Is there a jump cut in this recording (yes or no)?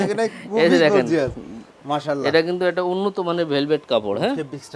no